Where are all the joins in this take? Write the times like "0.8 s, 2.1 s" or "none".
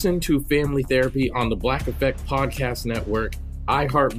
none